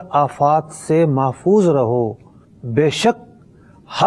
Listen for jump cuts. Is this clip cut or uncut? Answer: uncut